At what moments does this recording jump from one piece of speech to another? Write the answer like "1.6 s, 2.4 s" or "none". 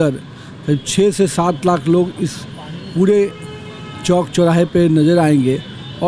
none